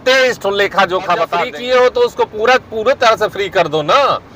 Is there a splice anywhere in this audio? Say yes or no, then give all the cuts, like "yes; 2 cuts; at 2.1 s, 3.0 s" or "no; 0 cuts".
yes; 1 cut; at 1.5 s